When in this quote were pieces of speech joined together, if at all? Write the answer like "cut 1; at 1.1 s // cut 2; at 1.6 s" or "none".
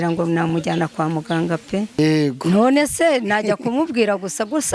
cut 1; at 2.0 s